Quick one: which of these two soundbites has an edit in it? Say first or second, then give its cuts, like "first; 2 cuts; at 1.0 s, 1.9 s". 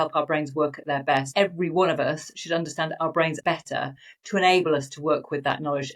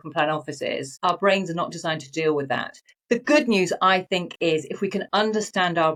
first; 2 cuts; at 1.3 s, 3.4 s